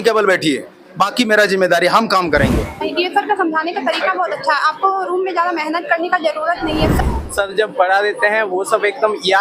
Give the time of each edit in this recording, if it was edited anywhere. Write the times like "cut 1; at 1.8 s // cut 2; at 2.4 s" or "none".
cut 1; at 2.8 s // cut 2; at 7.0 s